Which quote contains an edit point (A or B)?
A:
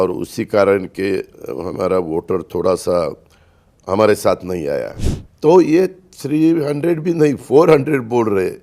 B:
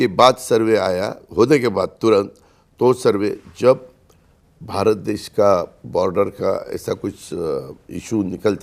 A